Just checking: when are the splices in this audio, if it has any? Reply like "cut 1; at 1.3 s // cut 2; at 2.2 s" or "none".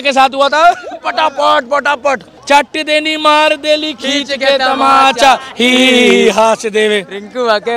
cut 1; at 2.3 s